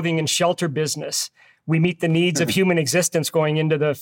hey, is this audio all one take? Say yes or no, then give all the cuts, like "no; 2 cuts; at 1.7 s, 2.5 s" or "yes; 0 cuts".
yes; 0 cuts